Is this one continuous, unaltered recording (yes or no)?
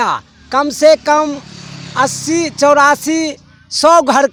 yes